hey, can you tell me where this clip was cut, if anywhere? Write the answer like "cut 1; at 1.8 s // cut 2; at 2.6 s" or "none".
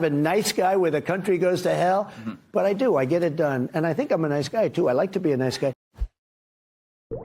cut 1; at 5.9 s